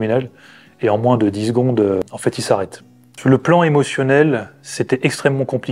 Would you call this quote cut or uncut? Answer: uncut